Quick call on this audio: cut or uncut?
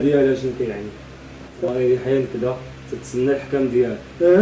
cut